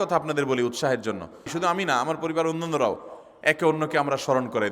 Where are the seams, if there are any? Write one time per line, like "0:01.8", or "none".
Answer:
0:01.5